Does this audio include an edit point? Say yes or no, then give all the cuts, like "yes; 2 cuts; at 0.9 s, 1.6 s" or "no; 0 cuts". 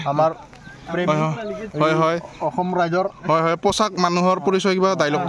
no; 0 cuts